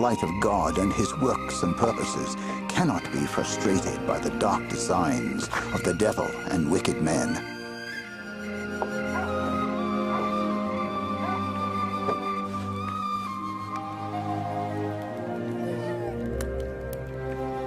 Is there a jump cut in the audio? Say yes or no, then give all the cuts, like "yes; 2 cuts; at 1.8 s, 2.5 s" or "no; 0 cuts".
no; 0 cuts